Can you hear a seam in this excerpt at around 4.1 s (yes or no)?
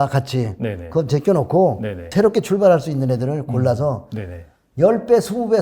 no